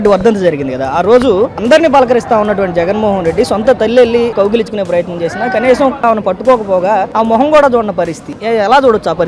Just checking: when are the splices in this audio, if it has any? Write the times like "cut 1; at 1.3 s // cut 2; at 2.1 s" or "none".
cut 1; at 4.3 s // cut 2; at 6.0 s // cut 3; at 7.1 s // cut 4; at 8.3 s